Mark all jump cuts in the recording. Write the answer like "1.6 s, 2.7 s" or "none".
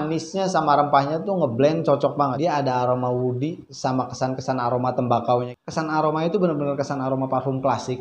2.1 s, 5.5 s